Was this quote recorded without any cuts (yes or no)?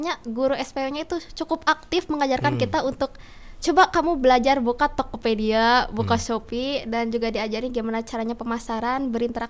yes